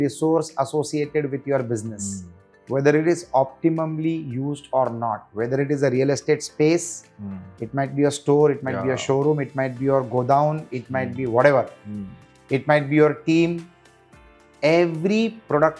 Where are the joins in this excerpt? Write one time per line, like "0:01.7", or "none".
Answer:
none